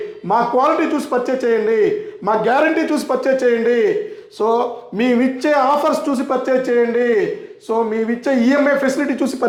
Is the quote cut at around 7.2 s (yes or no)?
no